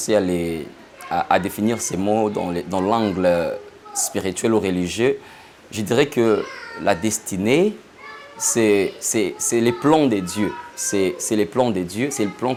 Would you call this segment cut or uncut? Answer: uncut